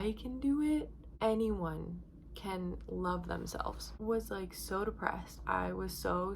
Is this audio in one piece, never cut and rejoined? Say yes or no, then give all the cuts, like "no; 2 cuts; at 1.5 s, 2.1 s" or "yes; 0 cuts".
no; 2 cuts; at 1.0 s, 3.8 s